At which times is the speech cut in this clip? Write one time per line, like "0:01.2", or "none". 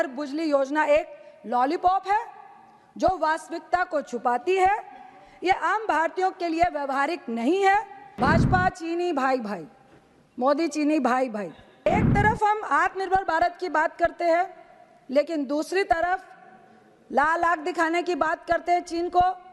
0:08.0
0:11.9